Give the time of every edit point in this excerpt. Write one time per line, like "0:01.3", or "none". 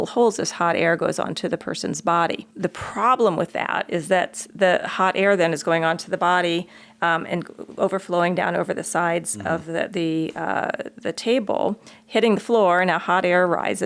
0:02.5